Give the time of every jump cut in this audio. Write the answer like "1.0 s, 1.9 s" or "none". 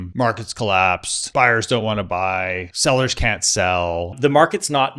1.1 s, 2.6 s, 4.2 s